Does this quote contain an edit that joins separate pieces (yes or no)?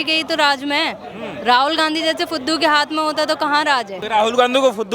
yes